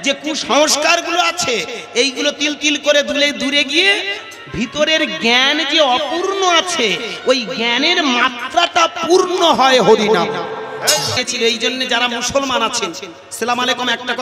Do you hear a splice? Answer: yes; 1 cut; at 11.1 s

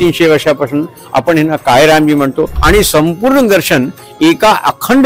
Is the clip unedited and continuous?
no; 1 cut; at 2.6 s

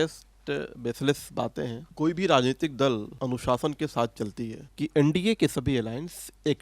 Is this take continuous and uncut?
no; 2 cuts; at 1.9 s, 4.7 s

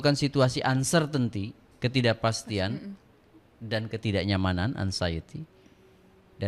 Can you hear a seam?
no; 0 cuts

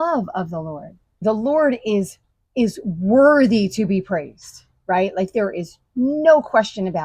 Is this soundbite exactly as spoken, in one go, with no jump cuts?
no; 1 cut; at 1.2 s

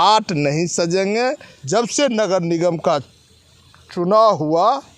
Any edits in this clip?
yes; 1 cut; at 1.5 s

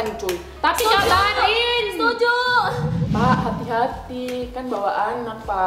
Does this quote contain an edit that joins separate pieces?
yes; 1 cut; at 3.0 s

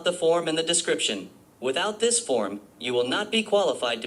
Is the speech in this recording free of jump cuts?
yes; 0 cuts

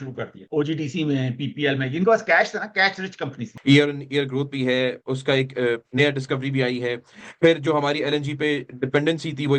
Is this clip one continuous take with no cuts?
no; 1 cut; at 3.5 s

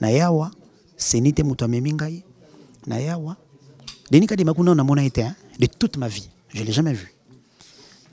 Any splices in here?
no; 0 cuts

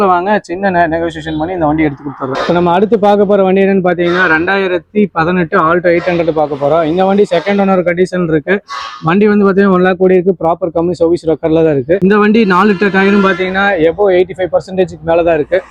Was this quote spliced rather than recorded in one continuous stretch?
no; 0 cuts

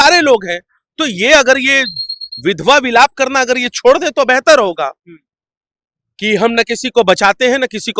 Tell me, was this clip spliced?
no; 0 cuts

